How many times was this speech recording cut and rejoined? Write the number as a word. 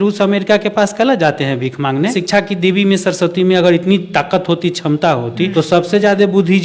two